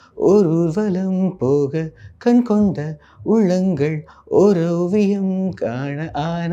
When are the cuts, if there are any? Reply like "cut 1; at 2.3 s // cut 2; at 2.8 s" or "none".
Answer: none